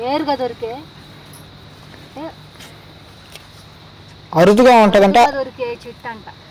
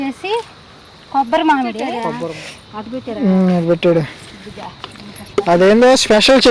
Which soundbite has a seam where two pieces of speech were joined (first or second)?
second